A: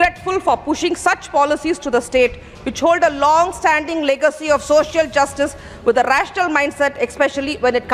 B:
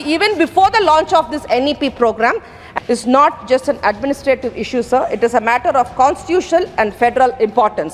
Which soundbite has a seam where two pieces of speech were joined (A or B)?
B